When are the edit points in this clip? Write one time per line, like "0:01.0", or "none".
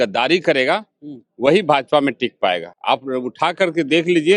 none